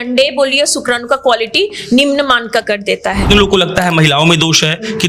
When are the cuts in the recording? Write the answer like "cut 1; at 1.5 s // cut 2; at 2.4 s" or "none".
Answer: cut 1; at 3.3 s